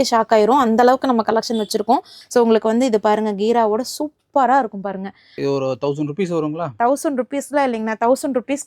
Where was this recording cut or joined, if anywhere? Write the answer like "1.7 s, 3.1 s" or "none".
2.2 s, 5.4 s